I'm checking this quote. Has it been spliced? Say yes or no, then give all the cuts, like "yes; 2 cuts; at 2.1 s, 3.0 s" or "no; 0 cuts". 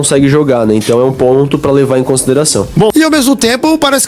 yes; 1 cut; at 2.9 s